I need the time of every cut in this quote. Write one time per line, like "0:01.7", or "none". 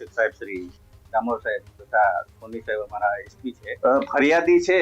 0:03.7